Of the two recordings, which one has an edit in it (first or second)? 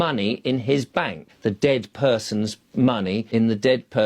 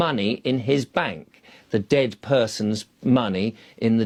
first